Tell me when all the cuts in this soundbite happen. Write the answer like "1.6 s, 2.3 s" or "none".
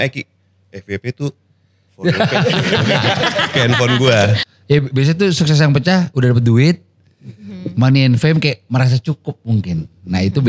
4.4 s